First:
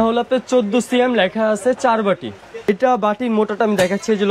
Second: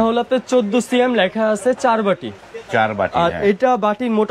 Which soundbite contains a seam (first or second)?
first